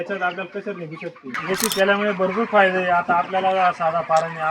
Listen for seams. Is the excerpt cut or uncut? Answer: cut